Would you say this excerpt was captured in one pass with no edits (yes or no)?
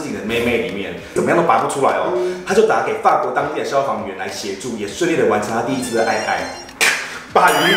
no